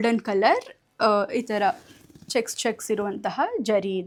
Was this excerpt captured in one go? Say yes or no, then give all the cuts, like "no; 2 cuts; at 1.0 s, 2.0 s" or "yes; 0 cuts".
yes; 0 cuts